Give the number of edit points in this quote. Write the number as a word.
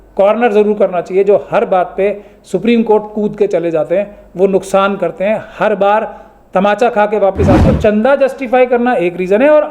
one